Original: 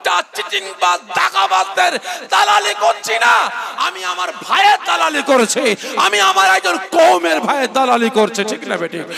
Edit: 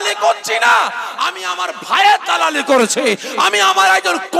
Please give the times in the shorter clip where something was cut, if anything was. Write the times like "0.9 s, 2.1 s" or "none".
none